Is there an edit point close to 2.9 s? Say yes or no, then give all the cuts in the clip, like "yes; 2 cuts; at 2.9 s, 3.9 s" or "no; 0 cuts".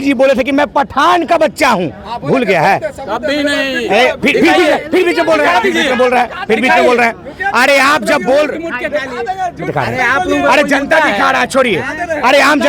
no; 0 cuts